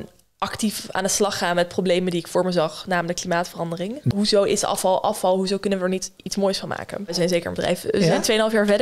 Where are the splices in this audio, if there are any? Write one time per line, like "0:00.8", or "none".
0:04.1
0:07.1